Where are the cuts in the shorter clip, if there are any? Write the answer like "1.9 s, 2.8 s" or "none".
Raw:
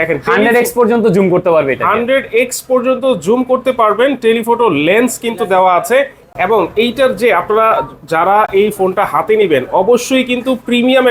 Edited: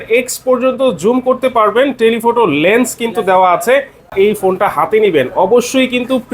4.1 s